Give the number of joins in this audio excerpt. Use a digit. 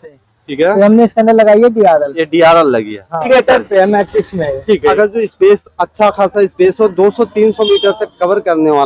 2